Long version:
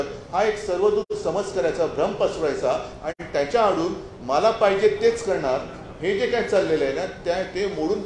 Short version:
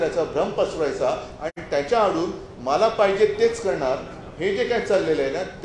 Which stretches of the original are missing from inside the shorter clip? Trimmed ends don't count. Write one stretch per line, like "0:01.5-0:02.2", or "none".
none